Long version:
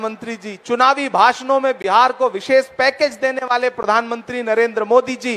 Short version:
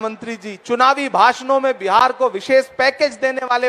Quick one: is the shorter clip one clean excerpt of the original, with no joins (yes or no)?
yes